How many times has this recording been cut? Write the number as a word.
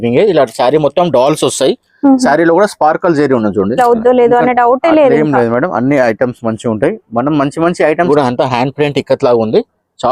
two